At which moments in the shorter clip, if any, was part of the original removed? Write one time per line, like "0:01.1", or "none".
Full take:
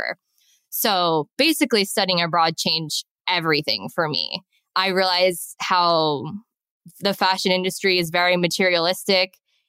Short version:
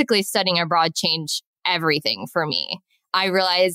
none